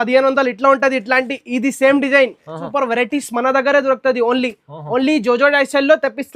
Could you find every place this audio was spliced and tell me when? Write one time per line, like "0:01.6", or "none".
0:02.6